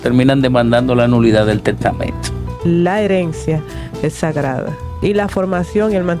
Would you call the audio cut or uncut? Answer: cut